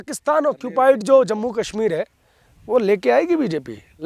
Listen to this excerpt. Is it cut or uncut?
uncut